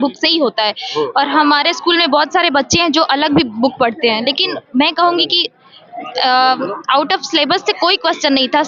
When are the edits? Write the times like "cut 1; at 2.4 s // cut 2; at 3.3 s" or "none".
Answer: none